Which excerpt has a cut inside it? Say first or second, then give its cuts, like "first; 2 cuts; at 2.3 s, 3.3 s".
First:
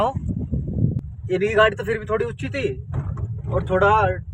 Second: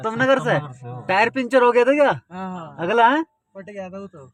first; 1 cut; at 1.1 s